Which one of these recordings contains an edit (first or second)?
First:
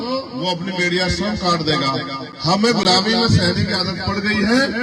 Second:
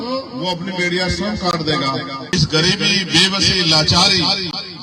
second